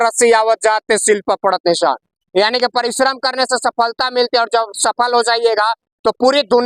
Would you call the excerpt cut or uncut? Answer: uncut